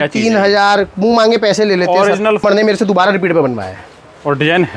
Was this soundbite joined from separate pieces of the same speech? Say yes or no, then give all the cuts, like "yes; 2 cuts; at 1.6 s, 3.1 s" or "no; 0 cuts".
yes; 1 cut; at 2.4 s